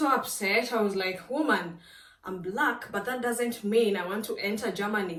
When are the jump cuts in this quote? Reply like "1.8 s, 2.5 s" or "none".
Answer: none